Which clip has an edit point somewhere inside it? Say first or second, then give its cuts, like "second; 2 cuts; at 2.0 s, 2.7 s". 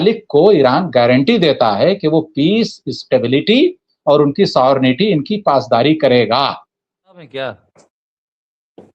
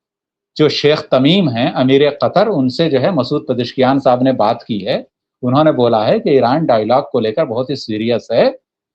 first; 1 cut; at 7.3 s